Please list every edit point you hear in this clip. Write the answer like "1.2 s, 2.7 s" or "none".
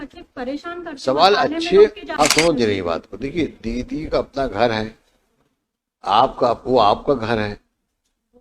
2.1 s